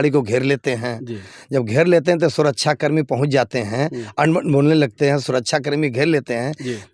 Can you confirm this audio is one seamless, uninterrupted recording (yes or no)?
yes